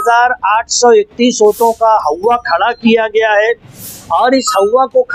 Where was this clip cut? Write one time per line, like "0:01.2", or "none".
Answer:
none